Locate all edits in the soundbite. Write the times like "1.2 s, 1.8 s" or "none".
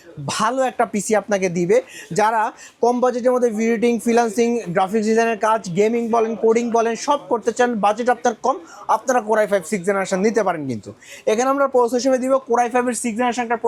none

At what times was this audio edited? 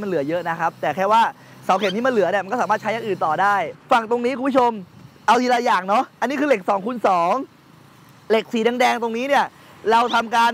3.7 s

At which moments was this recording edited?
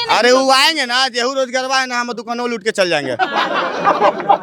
none

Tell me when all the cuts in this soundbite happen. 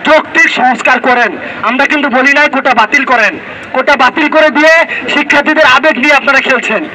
none

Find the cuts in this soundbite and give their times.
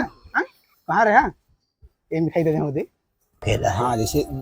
3.4 s

